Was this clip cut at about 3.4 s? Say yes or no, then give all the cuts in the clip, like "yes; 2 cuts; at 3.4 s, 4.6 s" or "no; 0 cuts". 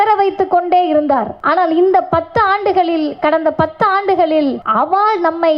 no; 2 cuts; at 1.3 s, 4.6 s